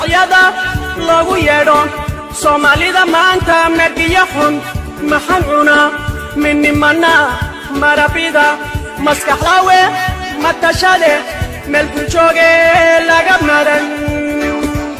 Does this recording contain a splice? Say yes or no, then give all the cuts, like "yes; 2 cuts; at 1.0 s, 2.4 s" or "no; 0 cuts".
no; 0 cuts